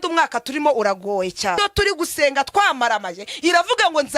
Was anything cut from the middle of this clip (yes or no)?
yes